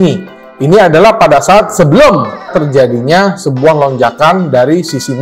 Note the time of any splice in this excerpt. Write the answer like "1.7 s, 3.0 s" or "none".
none